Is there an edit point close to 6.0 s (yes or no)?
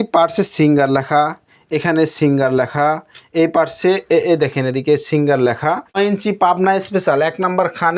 yes